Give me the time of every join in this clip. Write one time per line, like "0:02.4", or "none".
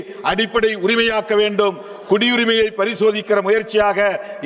none